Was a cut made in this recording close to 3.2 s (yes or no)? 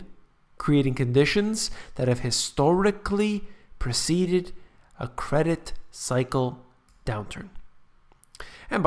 yes